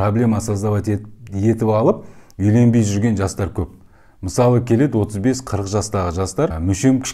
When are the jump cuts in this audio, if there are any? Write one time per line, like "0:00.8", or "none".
none